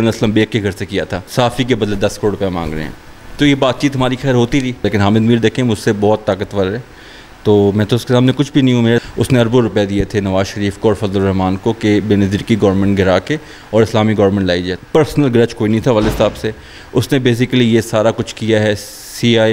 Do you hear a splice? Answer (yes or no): yes